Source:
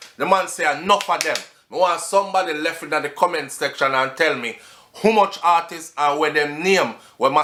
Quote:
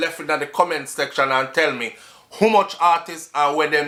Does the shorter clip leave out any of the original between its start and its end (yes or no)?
no